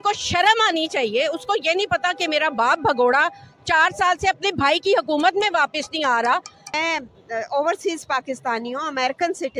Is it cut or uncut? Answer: cut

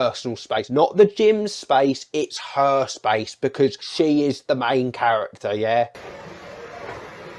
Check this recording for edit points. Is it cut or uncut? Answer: cut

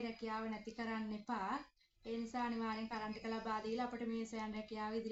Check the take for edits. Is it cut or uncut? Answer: uncut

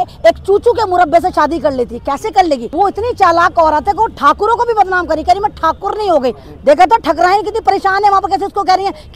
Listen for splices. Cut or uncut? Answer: cut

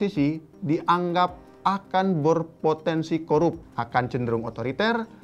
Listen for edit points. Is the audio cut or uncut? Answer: cut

